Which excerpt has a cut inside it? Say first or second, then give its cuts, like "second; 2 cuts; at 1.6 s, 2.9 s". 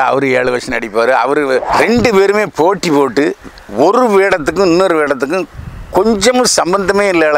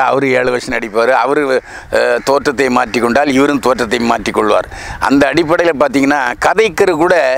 first; 1 cut; at 1.7 s